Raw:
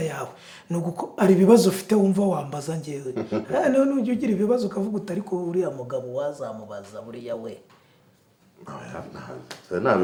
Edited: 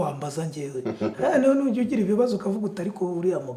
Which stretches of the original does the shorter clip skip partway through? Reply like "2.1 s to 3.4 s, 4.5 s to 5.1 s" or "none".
none